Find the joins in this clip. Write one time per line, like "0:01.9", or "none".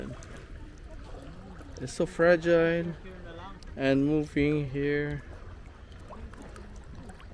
none